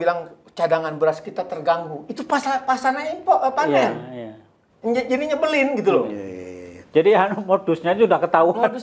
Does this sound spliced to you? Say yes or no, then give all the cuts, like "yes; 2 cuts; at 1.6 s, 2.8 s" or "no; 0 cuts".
no; 0 cuts